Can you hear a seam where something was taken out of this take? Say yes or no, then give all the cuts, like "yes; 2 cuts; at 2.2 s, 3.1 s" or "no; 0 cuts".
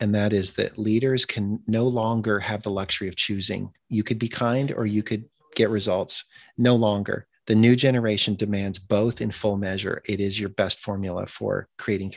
yes; 2 cuts; at 3.8 s, 10.0 s